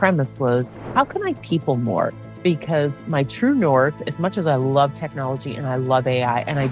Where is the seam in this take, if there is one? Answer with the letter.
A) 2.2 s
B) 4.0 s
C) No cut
A